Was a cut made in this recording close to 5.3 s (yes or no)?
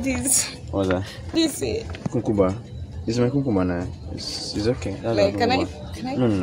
no